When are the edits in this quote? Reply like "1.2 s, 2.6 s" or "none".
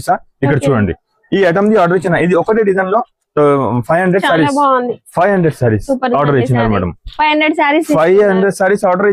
none